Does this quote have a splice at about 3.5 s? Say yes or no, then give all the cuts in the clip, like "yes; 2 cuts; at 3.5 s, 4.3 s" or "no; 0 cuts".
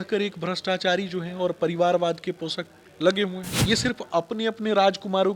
yes; 1 cut; at 3.5 s